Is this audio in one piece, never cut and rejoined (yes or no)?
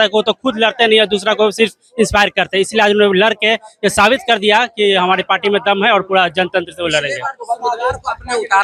yes